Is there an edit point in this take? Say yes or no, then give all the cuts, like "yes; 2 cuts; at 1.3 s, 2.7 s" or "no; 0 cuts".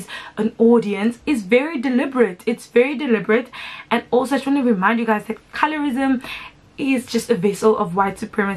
no; 0 cuts